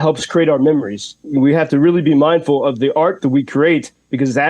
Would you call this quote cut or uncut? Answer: cut